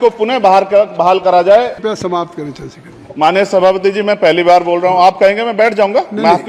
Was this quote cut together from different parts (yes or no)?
yes